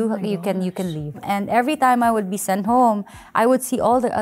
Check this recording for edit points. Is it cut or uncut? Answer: uncut